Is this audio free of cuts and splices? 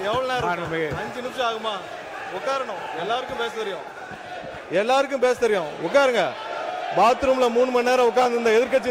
yes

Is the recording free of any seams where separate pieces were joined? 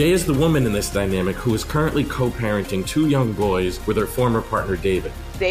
yes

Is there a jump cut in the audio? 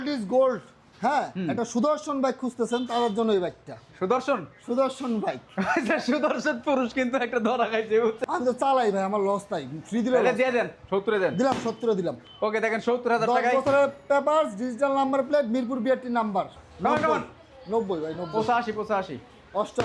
yes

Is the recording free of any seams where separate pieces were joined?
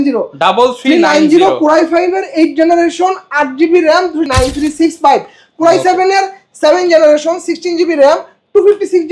no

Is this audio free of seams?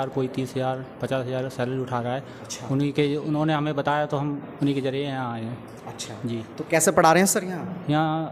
yes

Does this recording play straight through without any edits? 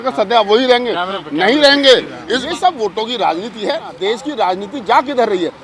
no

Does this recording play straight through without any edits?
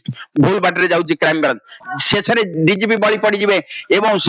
no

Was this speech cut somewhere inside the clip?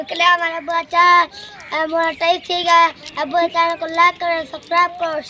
no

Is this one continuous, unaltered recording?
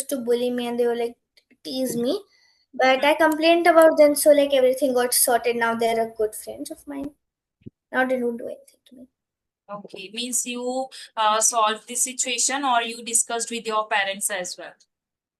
yes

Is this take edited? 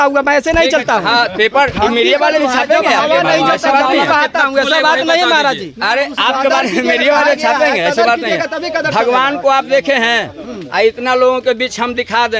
no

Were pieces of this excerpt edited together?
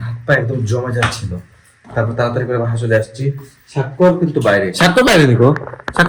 no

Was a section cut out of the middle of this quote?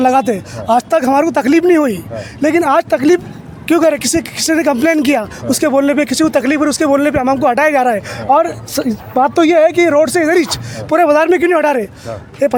no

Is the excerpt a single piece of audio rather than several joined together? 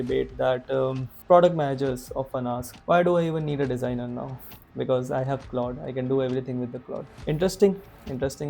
no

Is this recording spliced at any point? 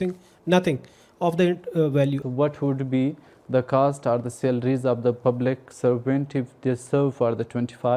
yes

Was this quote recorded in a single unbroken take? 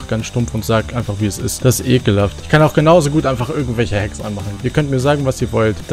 no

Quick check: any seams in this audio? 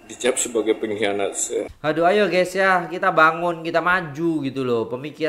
yes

